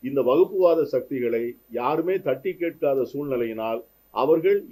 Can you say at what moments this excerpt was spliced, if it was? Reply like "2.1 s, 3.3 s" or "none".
none